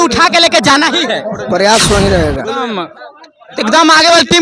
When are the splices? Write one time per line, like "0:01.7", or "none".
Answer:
0:02.8